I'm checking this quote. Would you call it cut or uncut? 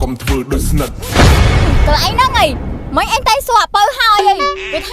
cut